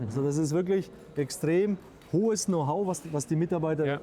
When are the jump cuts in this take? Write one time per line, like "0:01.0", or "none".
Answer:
none